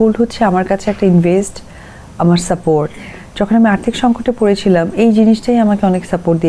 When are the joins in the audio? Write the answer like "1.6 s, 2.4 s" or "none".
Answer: none